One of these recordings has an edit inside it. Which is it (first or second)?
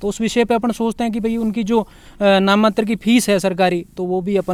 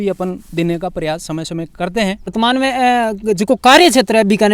second